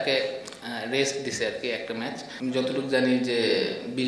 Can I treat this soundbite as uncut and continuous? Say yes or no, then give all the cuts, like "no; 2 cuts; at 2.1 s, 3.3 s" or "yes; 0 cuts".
no; 1 cut; at 2.2 s